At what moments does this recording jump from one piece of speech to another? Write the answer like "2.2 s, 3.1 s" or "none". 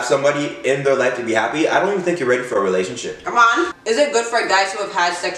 3.8 s